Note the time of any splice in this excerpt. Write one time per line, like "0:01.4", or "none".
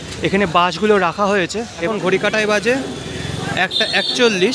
0:01.9